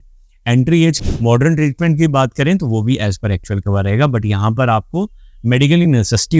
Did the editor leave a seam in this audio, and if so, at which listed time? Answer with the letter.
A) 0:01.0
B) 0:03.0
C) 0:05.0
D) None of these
A